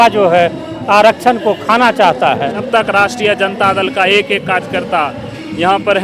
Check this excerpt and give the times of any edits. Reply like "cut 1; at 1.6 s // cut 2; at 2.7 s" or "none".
cut 1; at 2.7 s

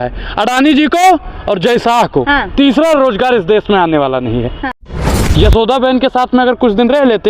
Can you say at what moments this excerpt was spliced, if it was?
cut 1; at 4.9 s

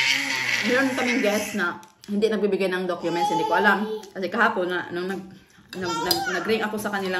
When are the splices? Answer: none

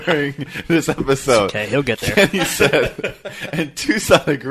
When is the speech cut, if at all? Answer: none

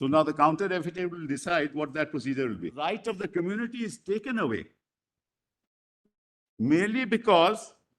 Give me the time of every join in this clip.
cut 1; at 2.9 s

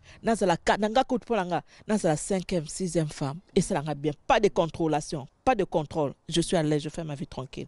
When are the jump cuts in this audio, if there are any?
none

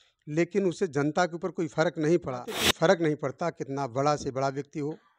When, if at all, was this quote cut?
cut 1; at 2.6 s

